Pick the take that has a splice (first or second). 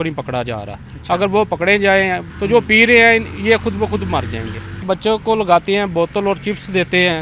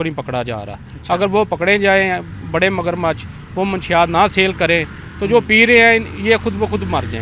first